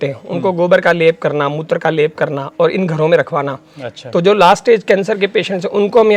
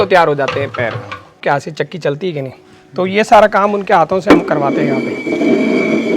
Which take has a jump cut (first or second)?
second